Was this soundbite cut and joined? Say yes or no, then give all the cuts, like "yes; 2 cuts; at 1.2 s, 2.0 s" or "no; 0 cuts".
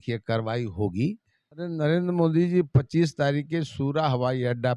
yes; 1 cut; at 1.6 s